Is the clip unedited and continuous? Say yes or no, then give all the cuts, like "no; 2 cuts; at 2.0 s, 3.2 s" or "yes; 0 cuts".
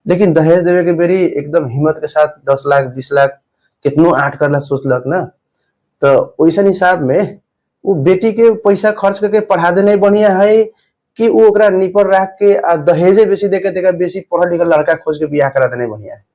yes; 0 cuts